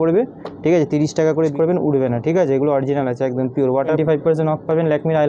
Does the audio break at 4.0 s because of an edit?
yes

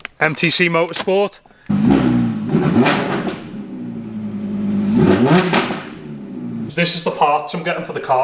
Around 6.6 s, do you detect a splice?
yes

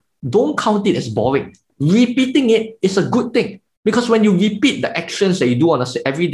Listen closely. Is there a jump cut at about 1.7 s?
yes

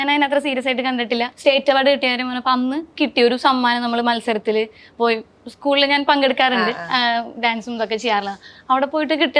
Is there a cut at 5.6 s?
no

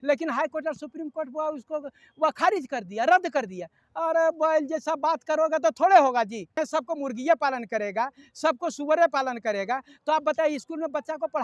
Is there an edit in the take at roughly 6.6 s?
yes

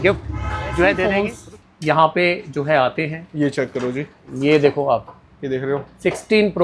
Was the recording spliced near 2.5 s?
no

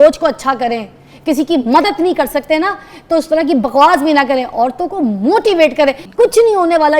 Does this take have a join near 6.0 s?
yes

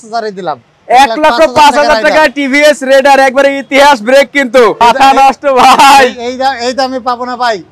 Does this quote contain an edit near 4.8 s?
yes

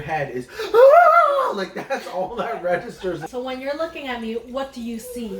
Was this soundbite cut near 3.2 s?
yes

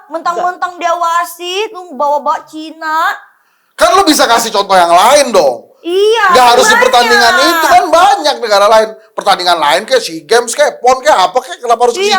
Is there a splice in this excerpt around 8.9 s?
no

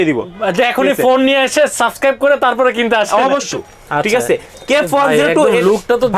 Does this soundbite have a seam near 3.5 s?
yes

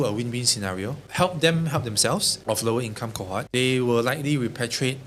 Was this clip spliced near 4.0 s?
no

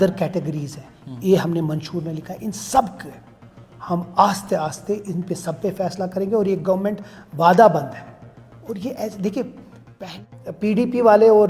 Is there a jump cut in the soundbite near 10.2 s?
yes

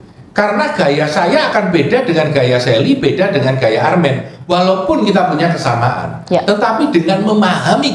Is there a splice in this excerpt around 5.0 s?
no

